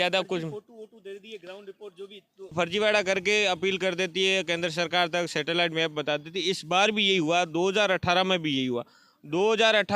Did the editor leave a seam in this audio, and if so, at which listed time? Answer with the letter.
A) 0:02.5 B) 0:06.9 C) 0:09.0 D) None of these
A